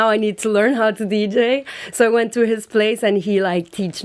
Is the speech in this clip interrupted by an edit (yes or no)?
no